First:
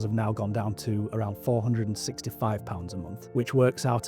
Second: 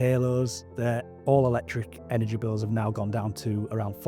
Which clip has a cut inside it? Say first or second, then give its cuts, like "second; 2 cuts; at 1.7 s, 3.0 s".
first; 1 cut; at 3.2 s